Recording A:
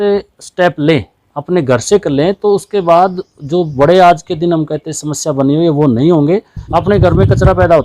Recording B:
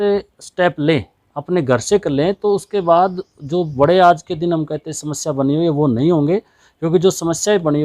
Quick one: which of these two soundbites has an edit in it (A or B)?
A